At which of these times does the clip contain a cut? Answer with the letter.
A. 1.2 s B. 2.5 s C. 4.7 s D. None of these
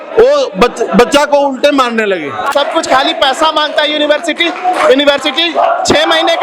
B